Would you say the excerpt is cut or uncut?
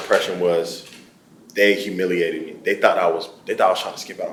uncut